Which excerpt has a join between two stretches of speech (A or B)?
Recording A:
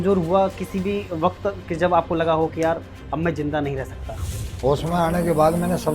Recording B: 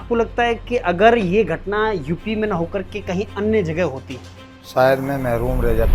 A